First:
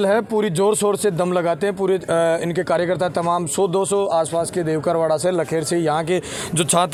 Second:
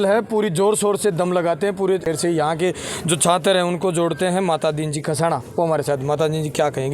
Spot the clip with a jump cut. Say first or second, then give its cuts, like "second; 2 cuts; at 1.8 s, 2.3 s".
second; 1 cut; at 2.0 s